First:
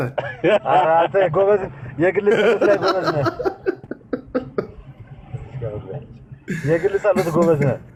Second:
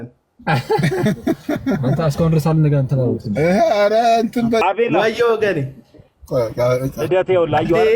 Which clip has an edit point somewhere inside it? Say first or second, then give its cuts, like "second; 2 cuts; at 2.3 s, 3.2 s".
second; 1 cut; at 4.6 s